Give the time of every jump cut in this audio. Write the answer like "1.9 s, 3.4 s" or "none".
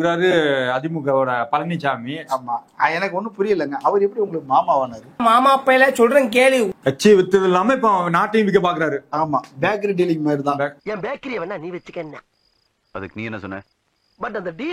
6.7 s